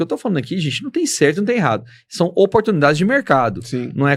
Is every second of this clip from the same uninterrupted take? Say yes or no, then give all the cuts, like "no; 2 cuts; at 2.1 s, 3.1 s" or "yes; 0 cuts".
yes; 0 cuts